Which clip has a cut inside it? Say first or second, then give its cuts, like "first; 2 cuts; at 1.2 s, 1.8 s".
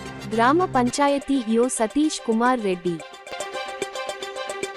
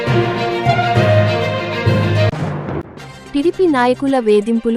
second; 1 cut; at 2.3 s